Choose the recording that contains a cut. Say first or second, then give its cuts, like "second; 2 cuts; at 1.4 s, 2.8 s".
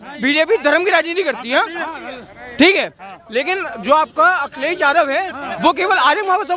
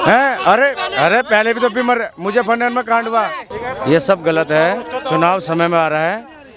second; 1 cut; at 3.6 s